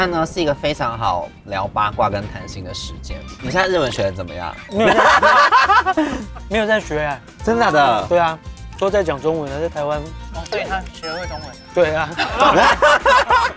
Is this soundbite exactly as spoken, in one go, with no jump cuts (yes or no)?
no